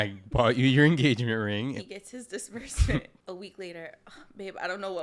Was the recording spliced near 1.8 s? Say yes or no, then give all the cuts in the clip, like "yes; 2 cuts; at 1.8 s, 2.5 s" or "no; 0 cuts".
yes; 2 cuts; at 1.8 s, 3.1 s